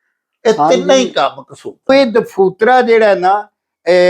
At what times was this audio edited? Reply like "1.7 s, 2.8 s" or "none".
1.9 s

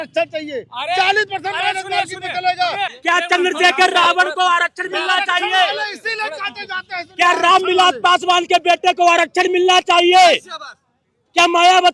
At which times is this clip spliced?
2.9 s

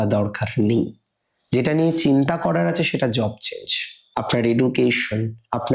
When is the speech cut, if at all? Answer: 3.9 s

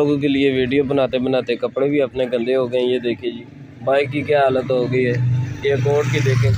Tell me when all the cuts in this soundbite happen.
none

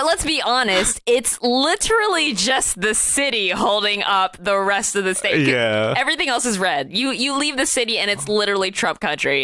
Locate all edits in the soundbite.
none

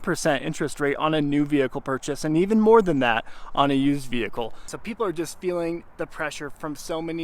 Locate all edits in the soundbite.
4.7 s

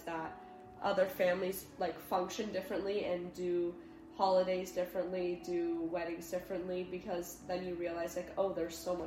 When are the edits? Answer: none

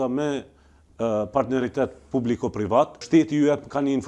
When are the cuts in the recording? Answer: 3.0 s

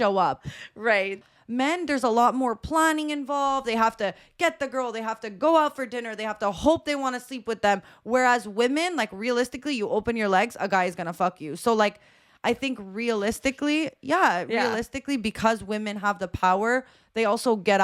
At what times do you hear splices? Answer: 1.2 s

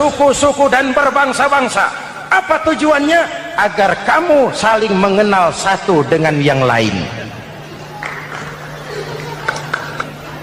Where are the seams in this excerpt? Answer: none

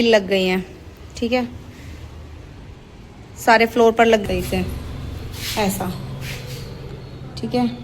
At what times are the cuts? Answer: 4.2 s

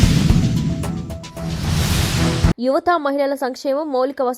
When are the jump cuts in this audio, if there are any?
2.6 s

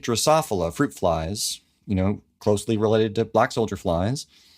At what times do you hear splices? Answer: 2.3 s

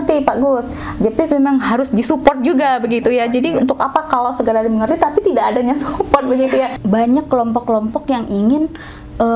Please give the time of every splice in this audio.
6.7 s

